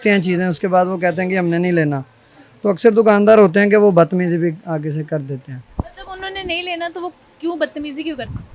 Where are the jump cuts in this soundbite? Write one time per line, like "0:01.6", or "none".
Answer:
none